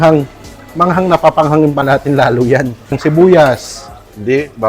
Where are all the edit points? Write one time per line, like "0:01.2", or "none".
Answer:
0:03.0